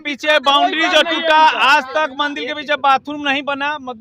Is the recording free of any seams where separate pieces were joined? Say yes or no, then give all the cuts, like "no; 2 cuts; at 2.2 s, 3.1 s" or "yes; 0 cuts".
yes; 0 cuts